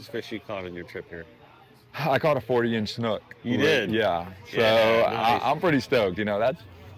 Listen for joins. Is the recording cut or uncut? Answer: uncut